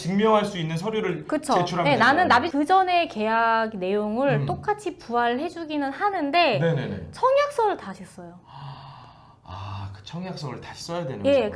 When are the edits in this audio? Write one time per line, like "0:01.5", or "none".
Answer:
0:02.5